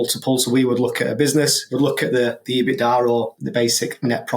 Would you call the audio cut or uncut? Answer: cut